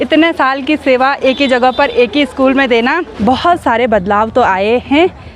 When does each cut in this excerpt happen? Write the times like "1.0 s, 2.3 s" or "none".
3.1 s